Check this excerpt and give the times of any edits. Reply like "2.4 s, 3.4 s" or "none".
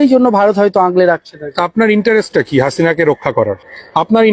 none